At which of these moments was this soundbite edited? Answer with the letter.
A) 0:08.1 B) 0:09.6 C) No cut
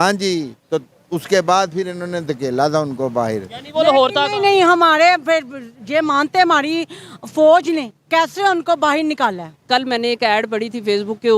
B